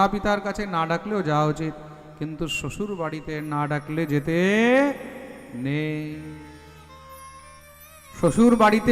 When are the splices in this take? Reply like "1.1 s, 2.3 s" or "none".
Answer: none